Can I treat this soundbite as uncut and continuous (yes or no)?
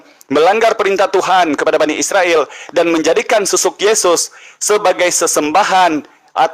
yes